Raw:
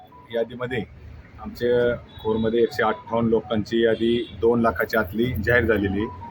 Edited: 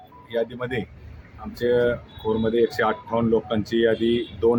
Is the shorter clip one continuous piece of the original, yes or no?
yes